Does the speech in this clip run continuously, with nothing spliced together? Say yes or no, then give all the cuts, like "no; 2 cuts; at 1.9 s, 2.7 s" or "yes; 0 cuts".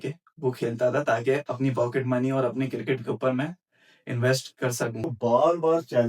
no; 1 cut; at 5.0 s